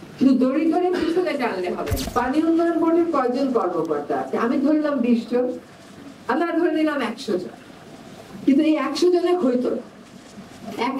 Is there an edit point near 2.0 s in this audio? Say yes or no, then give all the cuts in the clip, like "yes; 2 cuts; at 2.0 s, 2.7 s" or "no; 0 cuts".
yes; 1 cut; at 2.0 s